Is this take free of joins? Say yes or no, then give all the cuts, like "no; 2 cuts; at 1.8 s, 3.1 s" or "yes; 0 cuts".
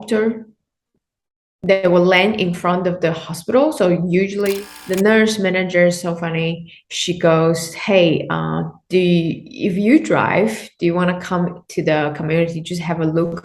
no; 1 cut; at 4.7 s